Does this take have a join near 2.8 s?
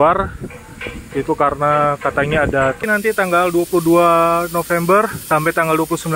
yes; 2 cuts; at 2.8 s, 5.2 s

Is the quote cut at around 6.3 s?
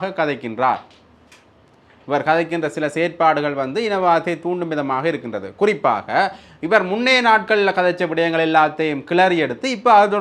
no; 0 cuts

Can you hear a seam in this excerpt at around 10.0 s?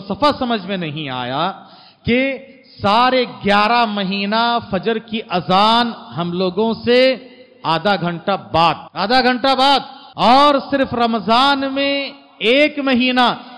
yes; 2 cuts; at 8.9 s, 10.0 s

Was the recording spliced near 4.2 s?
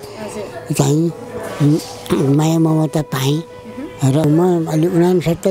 yes; 1 cut; at 4.2 s

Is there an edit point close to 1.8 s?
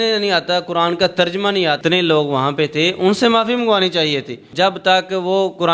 yes; 2 cuts; at 1.8 s, 4.5 s

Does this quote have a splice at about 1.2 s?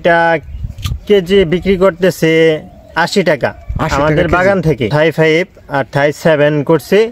no; 1 cut; at 4.9 s

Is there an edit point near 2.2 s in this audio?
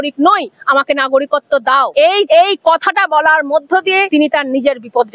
yes; 2 cuts; at 2.2 s, 4.1 s

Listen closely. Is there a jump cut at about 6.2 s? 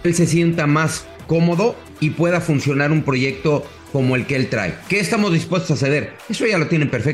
no; 2 cuts; at 1.9 s, 3.8 s

